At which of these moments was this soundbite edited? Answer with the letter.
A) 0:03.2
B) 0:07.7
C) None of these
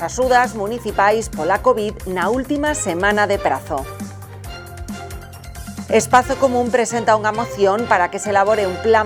C